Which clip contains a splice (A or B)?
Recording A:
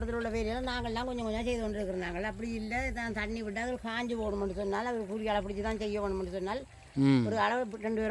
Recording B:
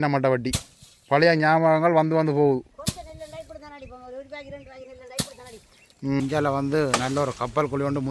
B